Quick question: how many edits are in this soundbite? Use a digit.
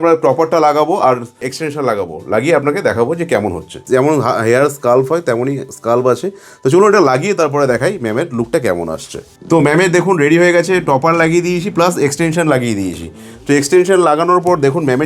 1